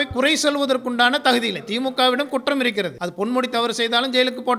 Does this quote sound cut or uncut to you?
cut